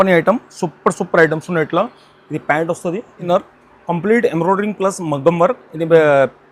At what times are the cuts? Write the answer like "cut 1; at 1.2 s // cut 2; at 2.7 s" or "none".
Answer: cut 1; at 3.3 s